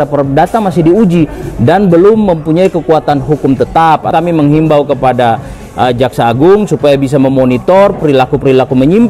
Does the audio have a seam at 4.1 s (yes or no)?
yes